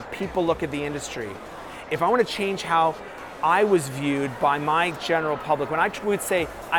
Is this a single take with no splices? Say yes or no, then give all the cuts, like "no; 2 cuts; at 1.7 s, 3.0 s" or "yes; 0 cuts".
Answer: yes; 0 cuts